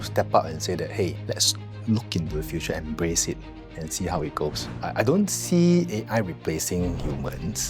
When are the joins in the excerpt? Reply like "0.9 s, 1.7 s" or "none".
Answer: 1.2 s, 4.7 s